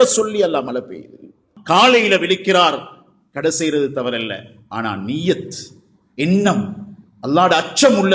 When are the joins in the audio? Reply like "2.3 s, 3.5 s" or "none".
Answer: 1.5 s